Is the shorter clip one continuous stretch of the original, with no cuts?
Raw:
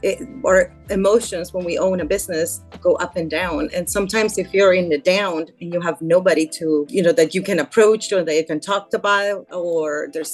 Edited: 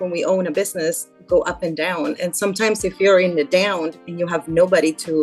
yes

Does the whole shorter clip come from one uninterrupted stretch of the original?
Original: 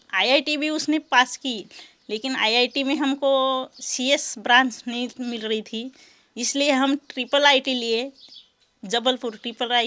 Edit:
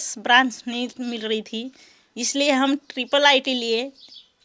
yes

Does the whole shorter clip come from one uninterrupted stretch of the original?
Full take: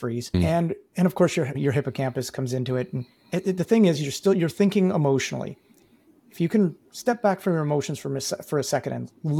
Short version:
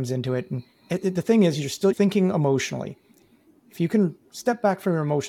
no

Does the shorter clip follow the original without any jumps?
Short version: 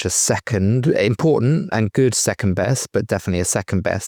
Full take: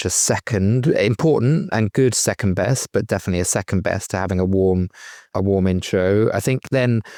yes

